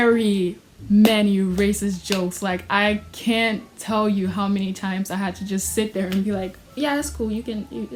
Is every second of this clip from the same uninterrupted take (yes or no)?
yes